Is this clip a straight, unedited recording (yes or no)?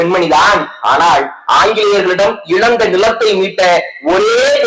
yes